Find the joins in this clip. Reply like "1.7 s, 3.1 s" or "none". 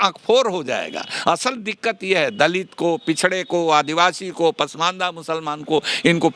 none